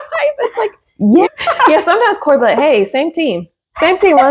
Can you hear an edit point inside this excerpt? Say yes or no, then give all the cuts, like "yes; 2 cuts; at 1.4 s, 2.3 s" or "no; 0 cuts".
yes; 1 cut; at 1.3 s